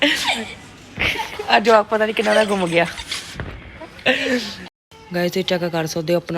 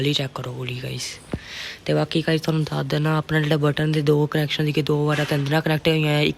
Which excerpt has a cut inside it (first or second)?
first